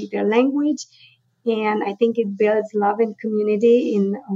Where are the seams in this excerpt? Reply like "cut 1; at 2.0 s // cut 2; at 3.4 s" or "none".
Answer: none